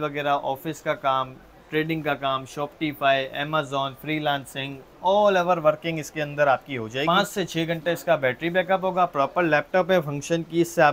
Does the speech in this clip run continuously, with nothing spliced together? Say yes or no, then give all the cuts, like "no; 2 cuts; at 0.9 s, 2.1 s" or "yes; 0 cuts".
no; 1 cut; at 7.0 s